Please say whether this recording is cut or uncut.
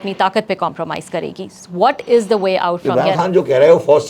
cut